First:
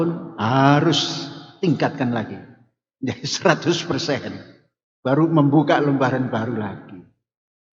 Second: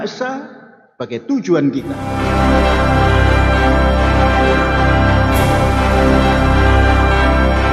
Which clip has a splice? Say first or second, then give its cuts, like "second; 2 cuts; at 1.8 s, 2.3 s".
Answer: second; 1 cut; at 2.0 s